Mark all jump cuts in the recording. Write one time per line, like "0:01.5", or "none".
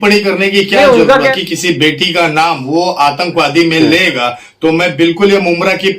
0:01.4